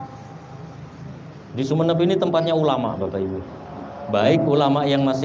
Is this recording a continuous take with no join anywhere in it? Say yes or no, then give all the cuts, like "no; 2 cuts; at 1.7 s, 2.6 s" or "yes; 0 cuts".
yes; 0 cuts